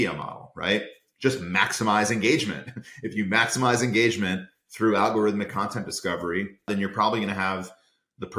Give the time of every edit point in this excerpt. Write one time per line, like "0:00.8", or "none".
0:06.7